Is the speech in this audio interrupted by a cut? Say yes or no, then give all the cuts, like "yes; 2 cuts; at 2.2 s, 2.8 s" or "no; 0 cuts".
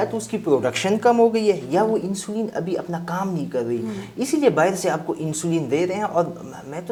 no; 0 cuts